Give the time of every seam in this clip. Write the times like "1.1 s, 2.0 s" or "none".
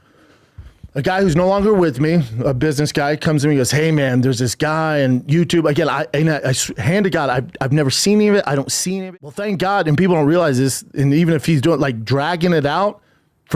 8.8 s